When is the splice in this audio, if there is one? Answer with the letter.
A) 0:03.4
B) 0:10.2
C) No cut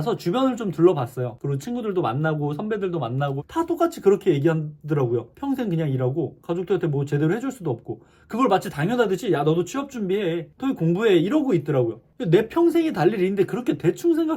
A